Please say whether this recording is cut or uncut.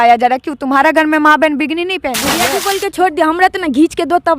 cut